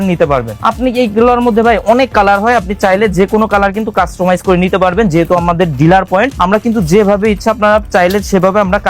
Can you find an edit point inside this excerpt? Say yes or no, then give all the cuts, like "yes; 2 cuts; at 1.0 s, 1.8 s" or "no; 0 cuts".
no; 0 cuts